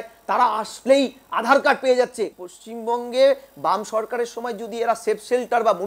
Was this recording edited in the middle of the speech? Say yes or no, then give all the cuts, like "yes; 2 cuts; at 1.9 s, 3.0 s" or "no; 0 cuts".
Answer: yes; 1 cut; at 2.4 s